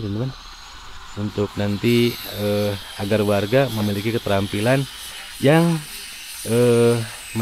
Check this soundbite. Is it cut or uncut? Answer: uncut